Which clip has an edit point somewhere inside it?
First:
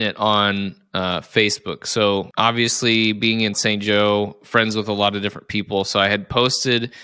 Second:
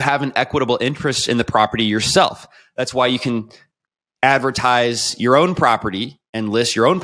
first; 1 cut; at 2.3 s

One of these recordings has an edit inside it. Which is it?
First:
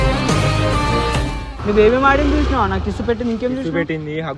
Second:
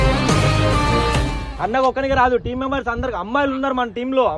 first; 1 cut; at 1.5 s

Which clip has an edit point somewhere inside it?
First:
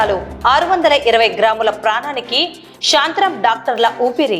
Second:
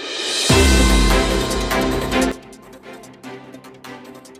second; 1 cut; at 2.3 s

